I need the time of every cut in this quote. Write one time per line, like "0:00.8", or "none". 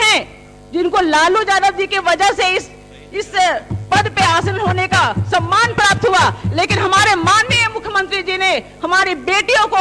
none